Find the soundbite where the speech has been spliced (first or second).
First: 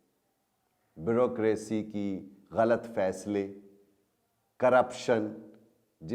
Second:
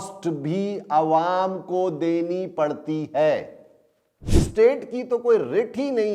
second